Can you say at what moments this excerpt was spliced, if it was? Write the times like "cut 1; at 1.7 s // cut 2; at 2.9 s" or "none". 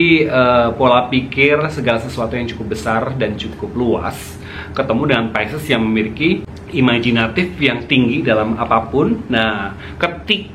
none